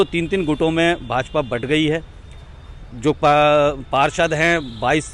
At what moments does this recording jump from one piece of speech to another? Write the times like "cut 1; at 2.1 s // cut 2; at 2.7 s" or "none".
none

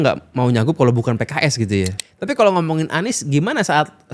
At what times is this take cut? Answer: cut 1; at 2.1 s

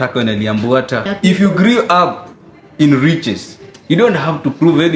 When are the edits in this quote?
cut 1; at 1.1 s

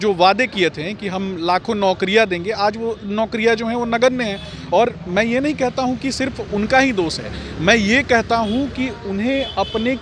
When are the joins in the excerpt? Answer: none

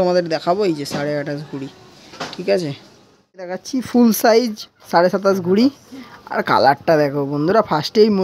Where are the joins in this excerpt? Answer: cut 1; at 3.7 s

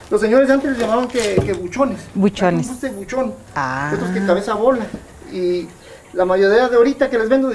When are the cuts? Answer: none

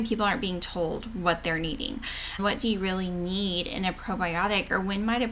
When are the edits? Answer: cut 1; at 2.4 s

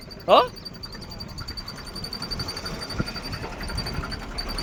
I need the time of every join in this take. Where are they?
none

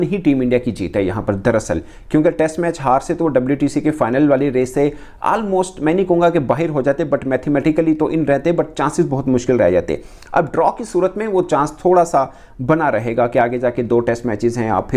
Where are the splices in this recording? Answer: none

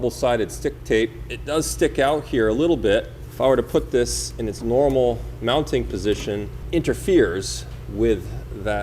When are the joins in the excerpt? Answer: cut 1; at 1.3 s // cut 2; at 3.2 s // cut 3; at 6.6 s

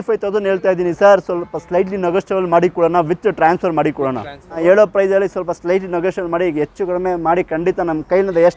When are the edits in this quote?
cut 1; at 4.6 s

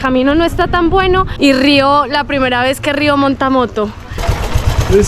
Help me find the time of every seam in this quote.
cut 1; at 1.3 s // cut 2; at 4.2 s

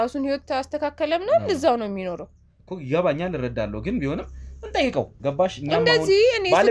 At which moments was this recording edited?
none

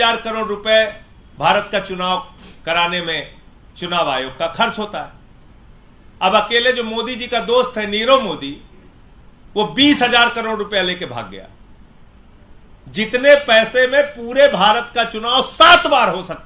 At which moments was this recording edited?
none

